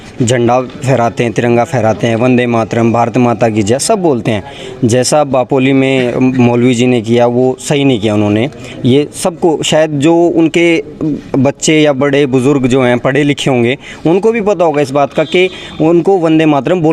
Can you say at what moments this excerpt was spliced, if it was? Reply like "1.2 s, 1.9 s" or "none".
none